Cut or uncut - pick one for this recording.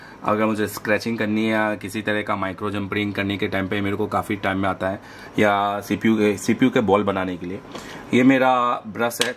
uncut